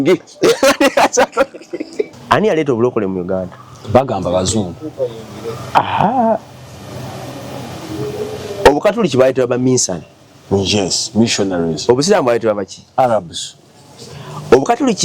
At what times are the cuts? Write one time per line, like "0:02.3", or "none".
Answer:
0:02.2